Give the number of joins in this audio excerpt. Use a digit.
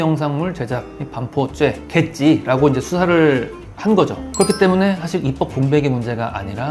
0